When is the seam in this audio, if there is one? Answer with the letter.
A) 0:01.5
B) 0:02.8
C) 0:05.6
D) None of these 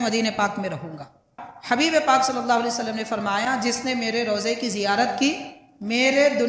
A